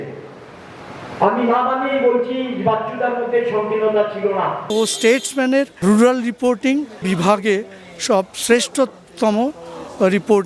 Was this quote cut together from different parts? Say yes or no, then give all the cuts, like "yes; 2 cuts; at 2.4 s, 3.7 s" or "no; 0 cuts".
yes; 3 cuts; at 4.6 s, 5.7 s, 7.0 s